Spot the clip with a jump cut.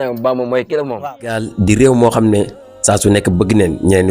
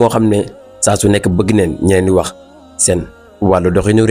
first; 1 cut; at 0.9 s

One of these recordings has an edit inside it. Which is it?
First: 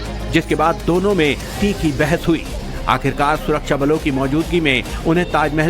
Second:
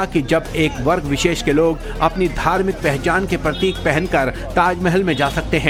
first; 1 cut; at 3.0 s

